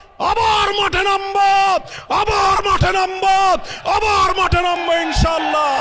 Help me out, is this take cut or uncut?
uncut